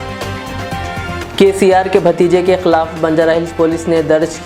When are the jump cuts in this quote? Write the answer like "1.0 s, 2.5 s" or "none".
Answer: 1.2 s